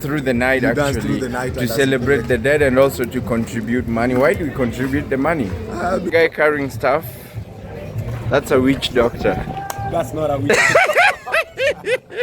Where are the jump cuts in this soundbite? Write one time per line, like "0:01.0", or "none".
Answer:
0:06.1